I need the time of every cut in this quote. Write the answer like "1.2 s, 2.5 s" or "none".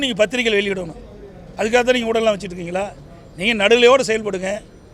none